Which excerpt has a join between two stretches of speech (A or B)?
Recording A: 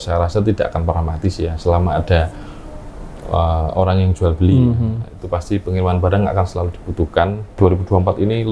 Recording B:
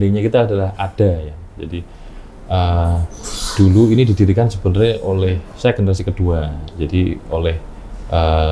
A